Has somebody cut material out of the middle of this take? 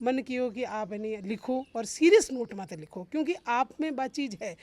no; 0 cuts

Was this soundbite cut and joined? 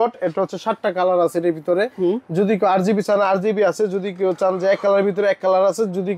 no; 0 cuts

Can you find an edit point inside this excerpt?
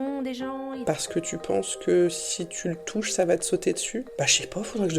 yes; 2 cuts; at 0.8 s, 4.1 s

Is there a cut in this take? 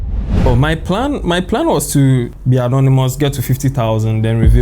yes; 1 cut; at 2.3 s

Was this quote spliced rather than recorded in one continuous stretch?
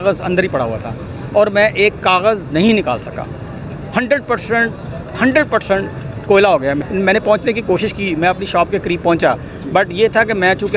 yes; 1 cut; at 6.8 s

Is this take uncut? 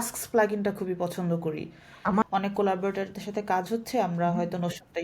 no; 1 cut; at 2.2 s

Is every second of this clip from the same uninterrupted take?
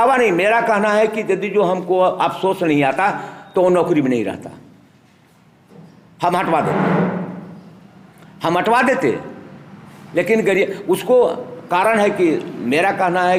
yes; 0 cuts

